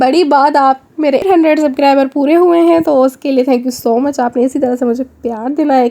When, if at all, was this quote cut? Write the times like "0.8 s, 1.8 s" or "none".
1.3 s